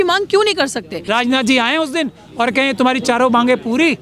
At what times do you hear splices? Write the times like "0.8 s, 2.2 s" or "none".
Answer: 1.0 s

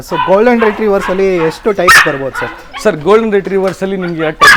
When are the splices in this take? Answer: none

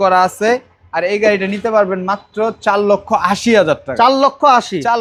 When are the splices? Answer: none

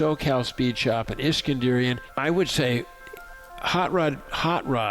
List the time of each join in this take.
2.1 s

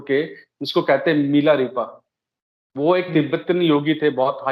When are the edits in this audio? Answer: none

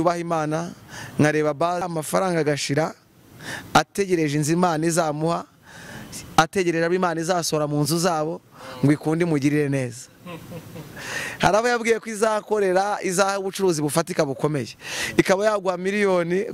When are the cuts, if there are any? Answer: 1.9 s

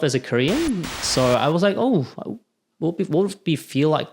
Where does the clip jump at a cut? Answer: 1.0 s

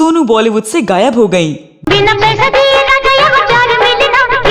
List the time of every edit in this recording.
1.8 s

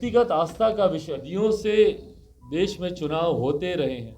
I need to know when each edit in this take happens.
1.2 s

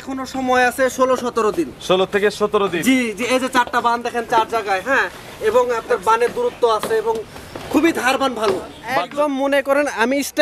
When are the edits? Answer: 8.8 s

